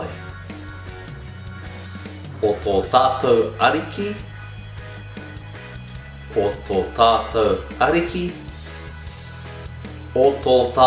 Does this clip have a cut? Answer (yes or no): yes